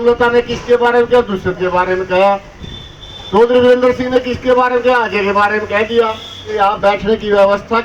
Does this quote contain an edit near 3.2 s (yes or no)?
no